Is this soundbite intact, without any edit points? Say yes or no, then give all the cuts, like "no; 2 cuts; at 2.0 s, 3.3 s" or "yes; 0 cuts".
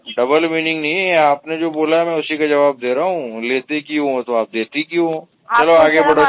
no; 1 cut; at 5.3 s